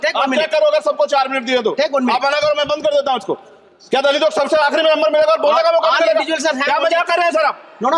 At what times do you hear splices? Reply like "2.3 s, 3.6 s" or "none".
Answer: none